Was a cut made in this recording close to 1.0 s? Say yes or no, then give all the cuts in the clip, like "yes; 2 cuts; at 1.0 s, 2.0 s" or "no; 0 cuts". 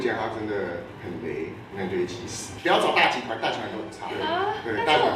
no; 1 cut; at 2.5 s